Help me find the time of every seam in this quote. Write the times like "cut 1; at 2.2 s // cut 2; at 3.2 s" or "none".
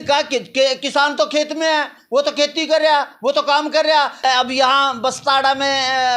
cut 1; at 4.2 s